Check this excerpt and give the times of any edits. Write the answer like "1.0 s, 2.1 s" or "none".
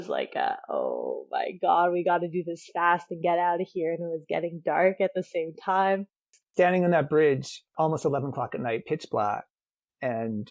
6.3 s